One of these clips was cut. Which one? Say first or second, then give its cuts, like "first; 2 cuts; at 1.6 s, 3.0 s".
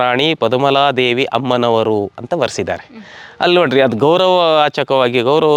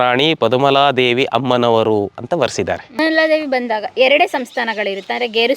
second; 1 cut; at 3.0 s